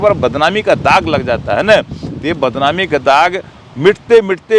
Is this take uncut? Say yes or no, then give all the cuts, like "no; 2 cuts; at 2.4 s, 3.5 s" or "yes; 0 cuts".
yes; 0 cuts